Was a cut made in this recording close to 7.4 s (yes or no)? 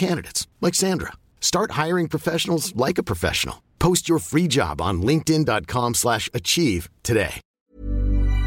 yes